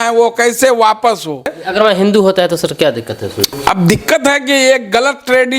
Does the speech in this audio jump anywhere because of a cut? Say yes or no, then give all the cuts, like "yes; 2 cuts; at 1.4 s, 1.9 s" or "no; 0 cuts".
yes; 2 cuts; at 1.6 s, 3.5 s